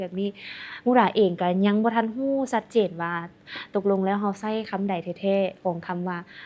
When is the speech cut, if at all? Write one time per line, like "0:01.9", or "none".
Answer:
none